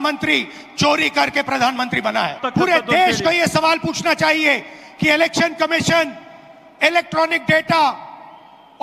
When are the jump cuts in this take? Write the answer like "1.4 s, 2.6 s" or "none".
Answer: none